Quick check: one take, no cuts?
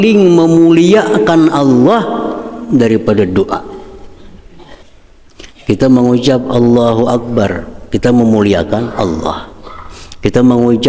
no; 1 cut; at 4.9 s

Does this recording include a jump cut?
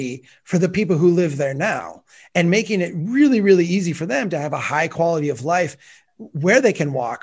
no; 0 cuts

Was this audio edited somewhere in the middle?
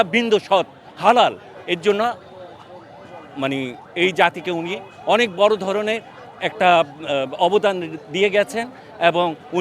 no; 0 cuts

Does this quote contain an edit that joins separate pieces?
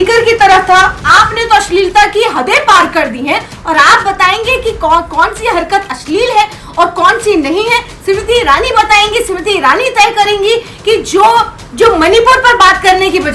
yes; 1 cut; at 1.0 s

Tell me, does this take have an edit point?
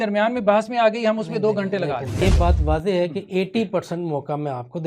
yes; 1 cut; at 2.2 s

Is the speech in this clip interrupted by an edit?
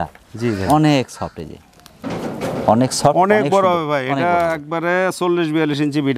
no; 0 cuts

